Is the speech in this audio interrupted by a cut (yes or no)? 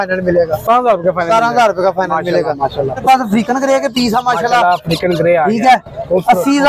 yes